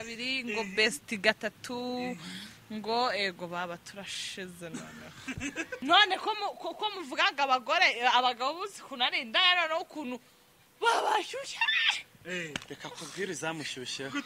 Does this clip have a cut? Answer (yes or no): yes